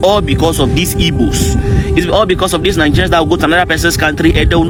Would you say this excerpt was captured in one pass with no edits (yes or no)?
yes